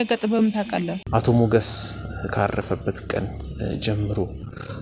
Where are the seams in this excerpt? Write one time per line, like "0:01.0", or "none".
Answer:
0:01.0